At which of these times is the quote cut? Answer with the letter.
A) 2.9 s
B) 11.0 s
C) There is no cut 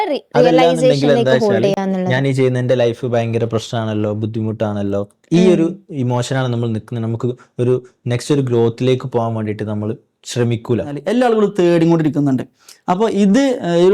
B